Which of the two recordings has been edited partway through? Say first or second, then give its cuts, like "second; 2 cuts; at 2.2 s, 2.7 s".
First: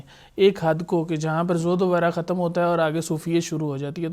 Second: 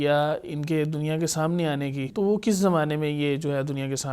second; 1 cut; at 2.0 s